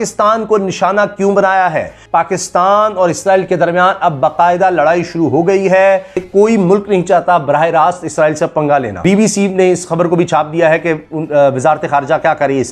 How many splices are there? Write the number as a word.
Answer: three